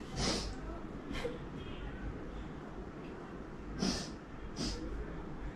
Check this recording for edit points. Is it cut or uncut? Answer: uncut